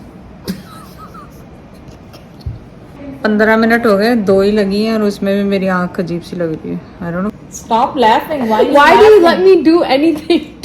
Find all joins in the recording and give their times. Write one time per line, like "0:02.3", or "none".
0:03.0
0:07.3